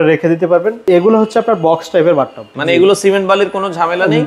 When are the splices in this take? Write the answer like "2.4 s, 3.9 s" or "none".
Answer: 0.8 s, 2.6 s